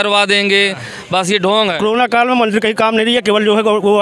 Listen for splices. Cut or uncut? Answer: cut